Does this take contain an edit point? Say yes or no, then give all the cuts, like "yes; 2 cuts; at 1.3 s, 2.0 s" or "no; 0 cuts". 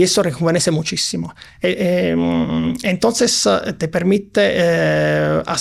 no; 0 cuts